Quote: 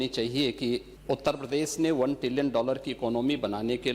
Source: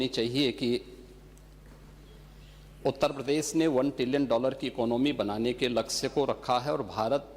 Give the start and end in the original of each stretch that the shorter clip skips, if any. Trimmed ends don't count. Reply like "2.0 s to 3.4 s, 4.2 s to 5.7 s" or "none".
0.9 s to 2.7 s